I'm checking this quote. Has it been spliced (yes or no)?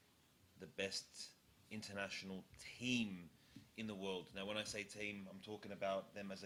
no